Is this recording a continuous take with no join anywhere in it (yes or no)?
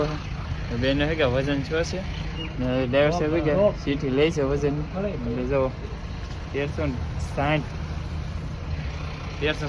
yes